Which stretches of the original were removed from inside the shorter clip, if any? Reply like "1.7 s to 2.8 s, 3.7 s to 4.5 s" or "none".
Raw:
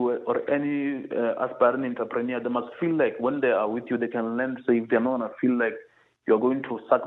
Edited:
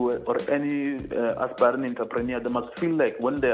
none